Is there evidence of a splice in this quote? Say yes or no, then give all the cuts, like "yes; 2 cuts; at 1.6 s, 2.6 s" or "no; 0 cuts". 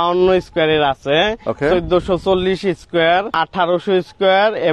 yes; 1 cut; at 3.3 s